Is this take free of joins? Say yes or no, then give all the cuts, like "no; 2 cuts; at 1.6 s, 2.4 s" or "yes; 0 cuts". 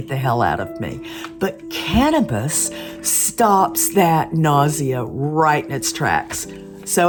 yes; 0 cuts